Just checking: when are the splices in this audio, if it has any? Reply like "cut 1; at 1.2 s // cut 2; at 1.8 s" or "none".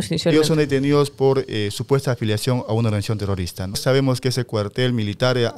cut 1; at 3.8 s